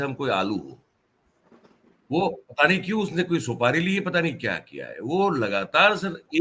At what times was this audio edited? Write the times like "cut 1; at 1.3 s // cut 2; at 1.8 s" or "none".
none